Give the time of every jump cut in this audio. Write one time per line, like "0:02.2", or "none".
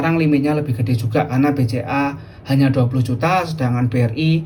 none